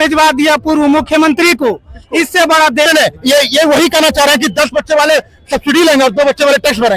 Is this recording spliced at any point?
yes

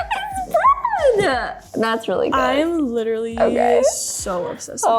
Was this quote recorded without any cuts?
no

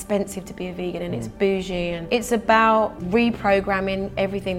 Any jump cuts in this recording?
yes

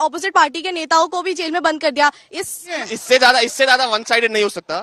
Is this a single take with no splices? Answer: no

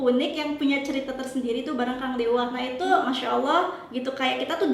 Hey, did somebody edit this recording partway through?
yes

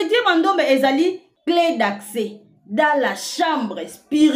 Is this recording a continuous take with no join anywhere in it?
no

